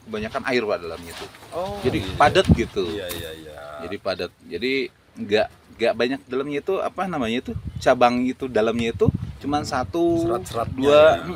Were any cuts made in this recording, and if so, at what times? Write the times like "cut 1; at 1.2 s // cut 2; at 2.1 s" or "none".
none